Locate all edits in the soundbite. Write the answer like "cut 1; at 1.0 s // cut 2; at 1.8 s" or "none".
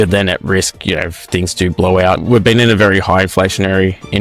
cut 1; at 2.2 s